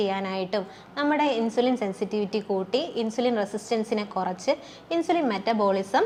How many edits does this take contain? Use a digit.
0